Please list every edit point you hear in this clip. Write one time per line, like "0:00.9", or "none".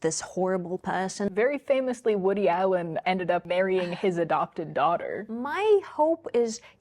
0:01.3
0:03.1
0:05.2